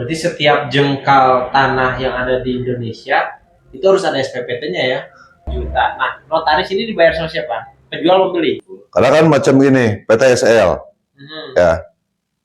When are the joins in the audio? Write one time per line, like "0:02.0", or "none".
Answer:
0:05.5
0:08.7